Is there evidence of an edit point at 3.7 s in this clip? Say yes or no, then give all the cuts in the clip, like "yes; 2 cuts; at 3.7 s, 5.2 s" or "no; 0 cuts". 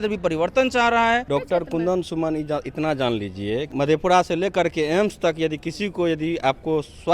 yes; 2 cuts; at 1.2 s, 3.7 s